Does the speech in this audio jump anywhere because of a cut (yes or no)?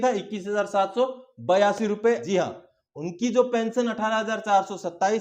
yes